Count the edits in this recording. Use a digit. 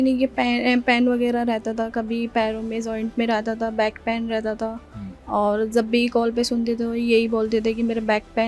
0